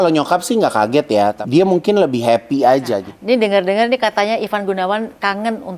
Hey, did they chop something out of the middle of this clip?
yes; 2 cuts; at 1.4 s, 3.1 s

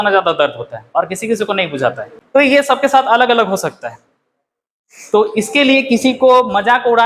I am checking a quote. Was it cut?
no; 0 cuts

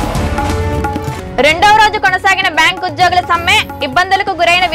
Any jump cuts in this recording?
no; 0 cuts

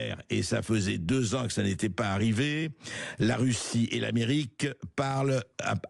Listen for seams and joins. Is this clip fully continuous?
yes; 0 cuts

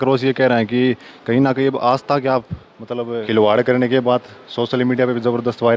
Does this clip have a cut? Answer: no; 0 cuts

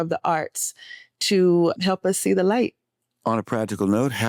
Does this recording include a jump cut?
no; 0 cuts

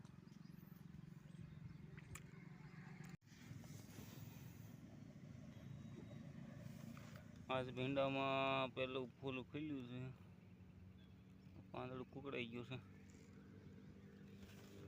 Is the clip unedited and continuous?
no; 1 cut; at 3.3 s

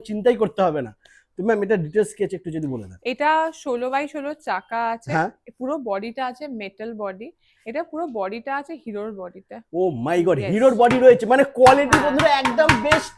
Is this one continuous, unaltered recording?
yes; 0 cuts

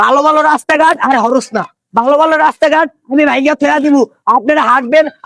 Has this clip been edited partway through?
no; 0 cuts

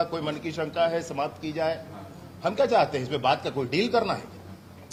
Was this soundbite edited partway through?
no; 0 cuts

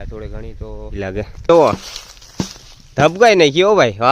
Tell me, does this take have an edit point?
yes; 1 cut; at 1.0 s

